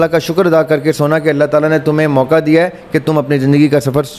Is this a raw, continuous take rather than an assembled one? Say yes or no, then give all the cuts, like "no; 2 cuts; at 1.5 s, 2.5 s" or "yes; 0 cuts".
yes; 0 cuts